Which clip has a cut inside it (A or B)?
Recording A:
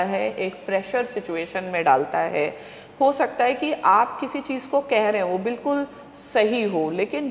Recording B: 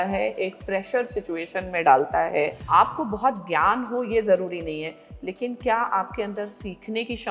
B